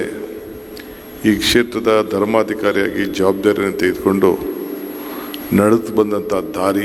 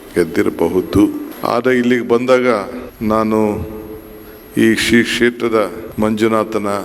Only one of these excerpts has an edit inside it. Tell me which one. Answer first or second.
second